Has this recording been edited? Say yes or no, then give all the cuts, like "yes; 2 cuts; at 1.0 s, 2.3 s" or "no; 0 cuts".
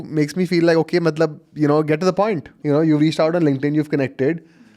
yes; 1 cut; at 2.5 s